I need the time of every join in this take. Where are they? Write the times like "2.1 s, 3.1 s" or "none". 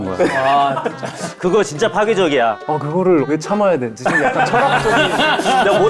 3.2 s